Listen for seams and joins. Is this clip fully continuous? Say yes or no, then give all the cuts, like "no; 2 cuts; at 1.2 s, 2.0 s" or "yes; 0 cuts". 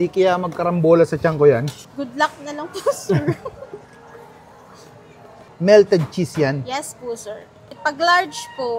yes; 0 cuts